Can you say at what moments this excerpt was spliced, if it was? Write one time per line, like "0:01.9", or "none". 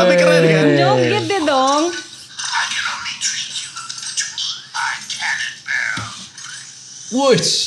none